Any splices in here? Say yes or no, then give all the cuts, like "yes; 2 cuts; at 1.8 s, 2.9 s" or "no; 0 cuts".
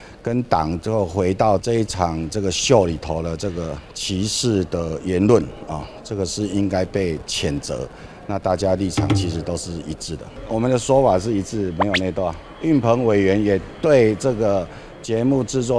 yes; 2 cuts; at 1.6 s, 10.4 s